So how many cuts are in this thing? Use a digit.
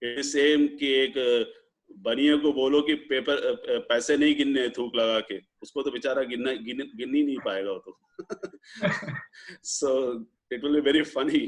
0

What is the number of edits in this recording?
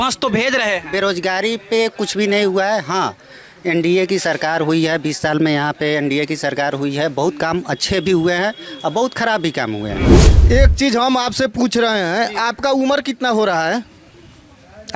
1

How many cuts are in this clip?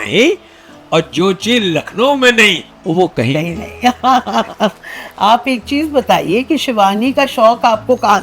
0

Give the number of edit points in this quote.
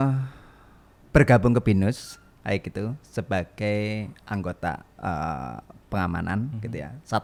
0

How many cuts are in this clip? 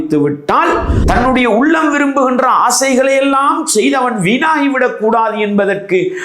1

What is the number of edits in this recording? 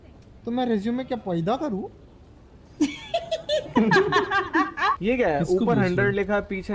1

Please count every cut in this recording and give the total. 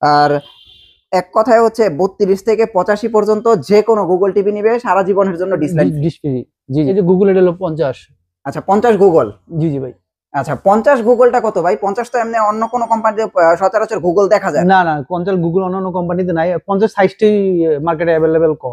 1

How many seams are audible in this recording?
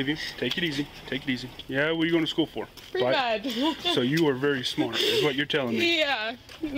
2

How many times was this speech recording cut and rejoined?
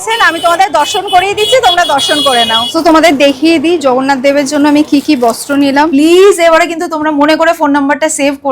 2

